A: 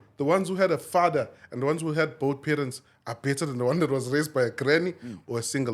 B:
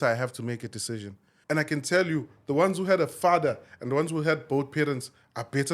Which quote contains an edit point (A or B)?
B